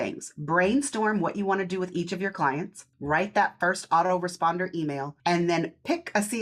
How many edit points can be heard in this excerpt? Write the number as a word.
two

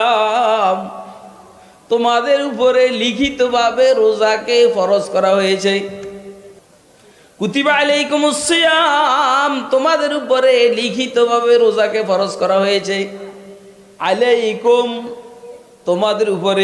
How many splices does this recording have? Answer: zero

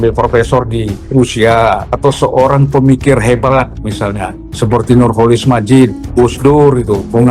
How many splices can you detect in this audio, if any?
four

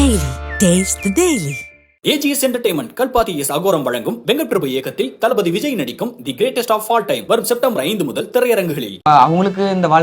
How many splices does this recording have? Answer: one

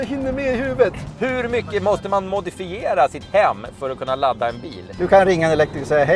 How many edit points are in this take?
two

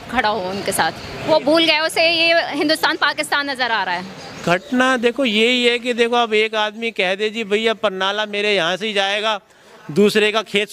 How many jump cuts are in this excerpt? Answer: two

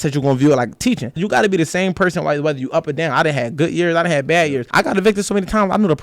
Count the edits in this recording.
two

